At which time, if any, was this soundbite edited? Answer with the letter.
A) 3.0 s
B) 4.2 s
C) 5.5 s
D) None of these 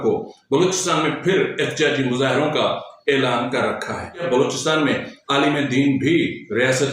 B